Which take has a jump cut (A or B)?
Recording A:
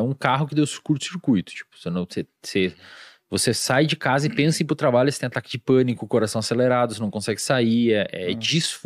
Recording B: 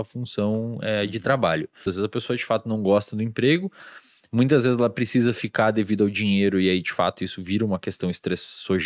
B